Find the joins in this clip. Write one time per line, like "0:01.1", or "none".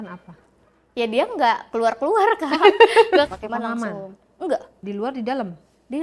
0:03.3